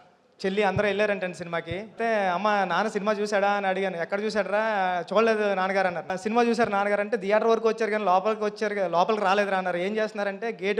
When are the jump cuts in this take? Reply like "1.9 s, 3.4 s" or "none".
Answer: 2.0 s, 6.1 s